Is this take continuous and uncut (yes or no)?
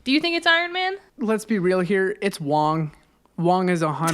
no